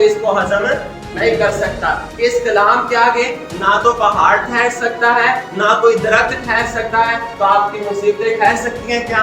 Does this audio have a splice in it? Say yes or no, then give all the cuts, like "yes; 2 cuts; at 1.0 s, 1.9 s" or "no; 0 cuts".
yes; 1 cut; at 2.0 s